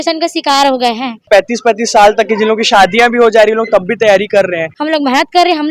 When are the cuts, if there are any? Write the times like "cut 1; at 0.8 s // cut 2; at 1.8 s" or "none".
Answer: cut 1; at 1.3 s // cut 2; at 4.7 s